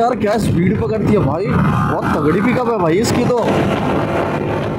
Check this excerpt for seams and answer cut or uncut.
uncut